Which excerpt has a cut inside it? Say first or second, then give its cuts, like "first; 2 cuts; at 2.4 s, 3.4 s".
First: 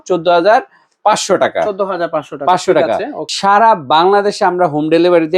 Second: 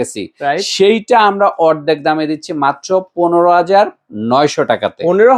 first; 1 cut; at 3.2 s